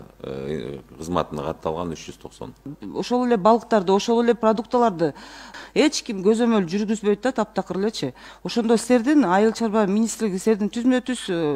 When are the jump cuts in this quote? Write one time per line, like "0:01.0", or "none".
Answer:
0:02.8